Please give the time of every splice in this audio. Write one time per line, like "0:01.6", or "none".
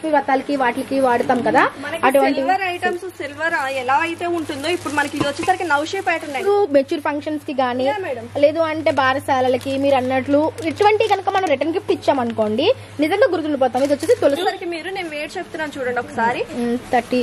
0:06.4
0:14.4